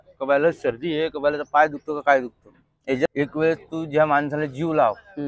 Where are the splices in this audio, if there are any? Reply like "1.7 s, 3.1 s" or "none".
3.1 s